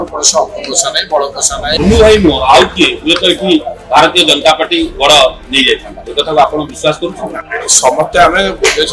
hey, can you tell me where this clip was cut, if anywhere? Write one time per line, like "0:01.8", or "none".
0:01.7